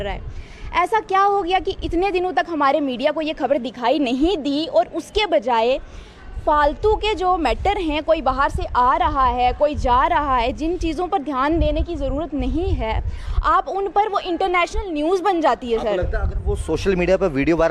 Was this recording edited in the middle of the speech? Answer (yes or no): no